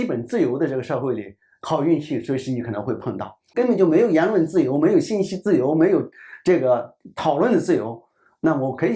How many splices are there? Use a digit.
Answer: 1